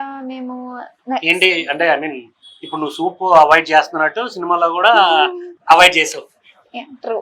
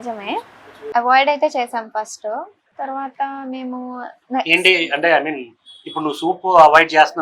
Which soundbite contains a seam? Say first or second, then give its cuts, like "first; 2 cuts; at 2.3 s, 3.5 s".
first; 1 cut; at 5.5 s